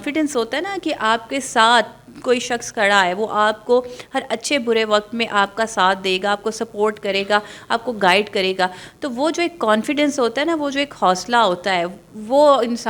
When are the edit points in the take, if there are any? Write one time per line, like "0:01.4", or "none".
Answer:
none